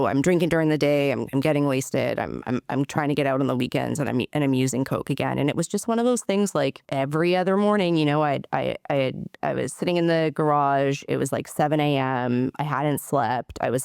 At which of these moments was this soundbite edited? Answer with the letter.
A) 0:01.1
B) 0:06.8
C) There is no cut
B